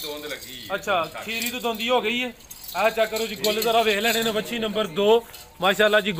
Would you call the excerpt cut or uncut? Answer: uncut